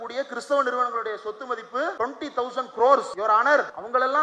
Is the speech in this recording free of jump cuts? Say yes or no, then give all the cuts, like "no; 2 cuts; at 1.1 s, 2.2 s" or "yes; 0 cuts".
no; 2 cuts; at 1.9 s, 3.5 s